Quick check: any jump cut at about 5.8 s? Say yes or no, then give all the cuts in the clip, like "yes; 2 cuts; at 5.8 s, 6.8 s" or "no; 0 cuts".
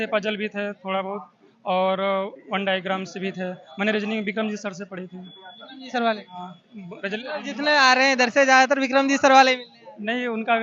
no; 0 cuts